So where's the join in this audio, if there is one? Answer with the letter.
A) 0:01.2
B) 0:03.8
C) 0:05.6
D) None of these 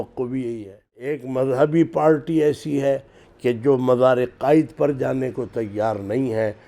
A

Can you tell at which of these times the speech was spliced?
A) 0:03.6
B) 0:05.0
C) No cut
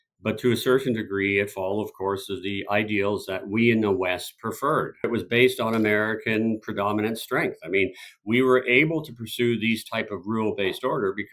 B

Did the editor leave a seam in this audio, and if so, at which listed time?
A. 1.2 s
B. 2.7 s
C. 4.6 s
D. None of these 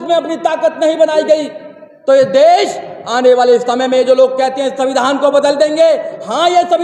D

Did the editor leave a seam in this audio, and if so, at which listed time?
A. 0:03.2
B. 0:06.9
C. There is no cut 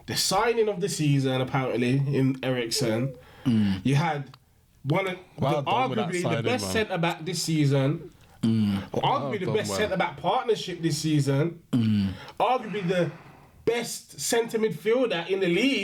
C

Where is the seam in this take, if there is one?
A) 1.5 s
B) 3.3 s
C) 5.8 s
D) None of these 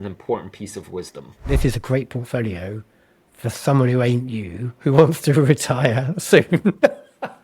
A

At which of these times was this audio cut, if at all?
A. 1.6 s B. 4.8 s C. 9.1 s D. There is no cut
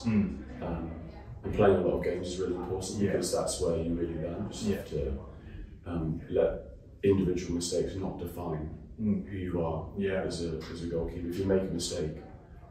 B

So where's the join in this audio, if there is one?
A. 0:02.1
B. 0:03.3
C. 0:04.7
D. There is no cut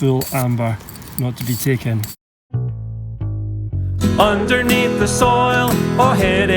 A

